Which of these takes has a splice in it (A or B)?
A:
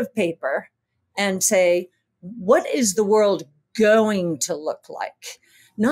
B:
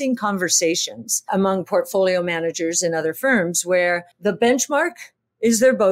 B